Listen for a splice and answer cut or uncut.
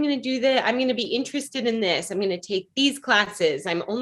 uncut